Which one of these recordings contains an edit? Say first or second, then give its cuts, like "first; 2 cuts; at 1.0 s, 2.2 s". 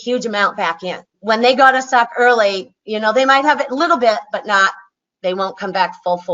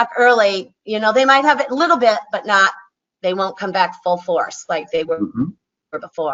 first; 1 cut; at 1.1 s